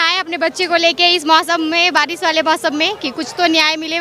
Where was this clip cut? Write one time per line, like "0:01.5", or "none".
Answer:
none